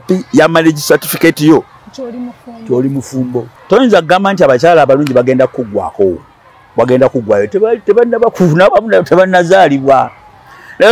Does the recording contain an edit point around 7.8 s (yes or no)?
no